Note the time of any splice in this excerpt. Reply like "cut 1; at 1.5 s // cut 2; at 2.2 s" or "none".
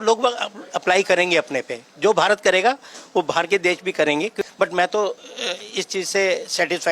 cut 1; at 4.5 s